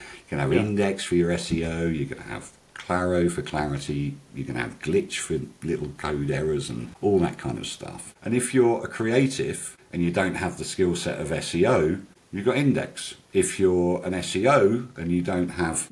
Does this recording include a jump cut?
no; 0 cuts

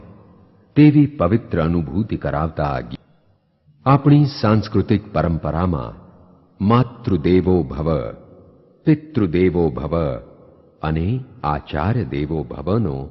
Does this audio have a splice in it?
yes; 1 cut; at 2.9 s

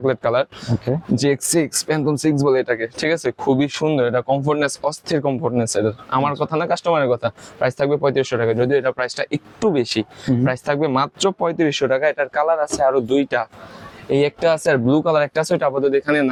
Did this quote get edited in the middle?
no; 0 cuts

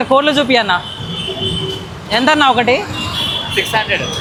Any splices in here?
no; 0 cuts

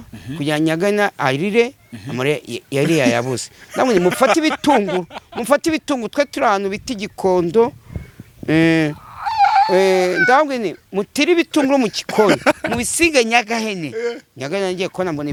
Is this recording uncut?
yes; 0 cuts

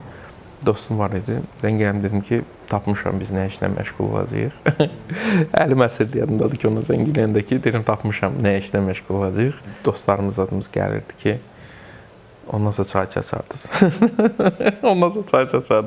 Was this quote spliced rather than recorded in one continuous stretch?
yes; 1 cut; at 9.8 s

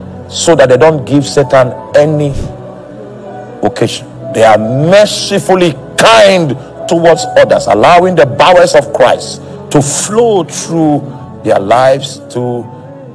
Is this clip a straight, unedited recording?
yes; 0 cuts

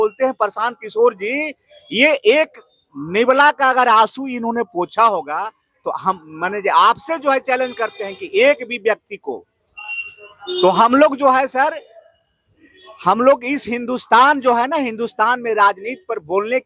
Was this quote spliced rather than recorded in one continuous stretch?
no; 0 cuts

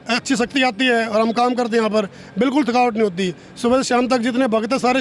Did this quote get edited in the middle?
no; 0 cuts

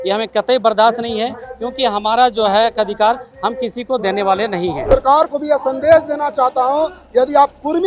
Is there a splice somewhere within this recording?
yes; 1 cut; at 4.9 s

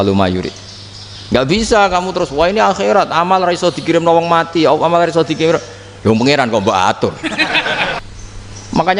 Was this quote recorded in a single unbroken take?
no; 1 cut; at 8.0 s

